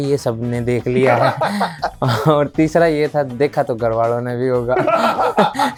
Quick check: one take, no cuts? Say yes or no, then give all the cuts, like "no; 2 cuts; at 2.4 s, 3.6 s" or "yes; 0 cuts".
yes; 0 cuts